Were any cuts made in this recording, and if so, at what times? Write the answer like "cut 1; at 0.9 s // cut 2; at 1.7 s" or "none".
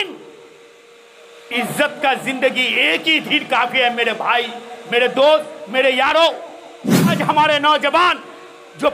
cut 1; at 7.1 s